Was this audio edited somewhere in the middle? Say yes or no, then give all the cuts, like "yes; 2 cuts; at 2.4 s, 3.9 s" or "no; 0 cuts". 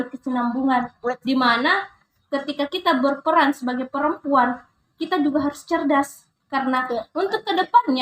no; 0 cuts